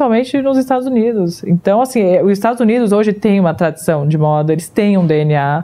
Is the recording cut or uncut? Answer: uncut